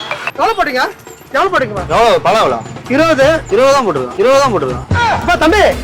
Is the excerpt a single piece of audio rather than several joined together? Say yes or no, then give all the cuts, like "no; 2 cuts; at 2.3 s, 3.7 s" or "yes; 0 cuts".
no; 2 cuts; at 1.8 s, 3.4 s